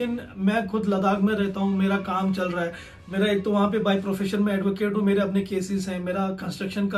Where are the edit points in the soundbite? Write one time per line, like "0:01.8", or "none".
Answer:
none